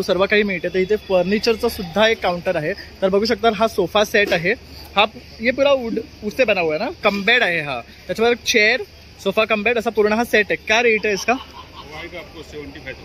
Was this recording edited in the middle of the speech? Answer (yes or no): no